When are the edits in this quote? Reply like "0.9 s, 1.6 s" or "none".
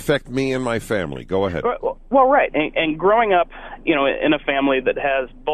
none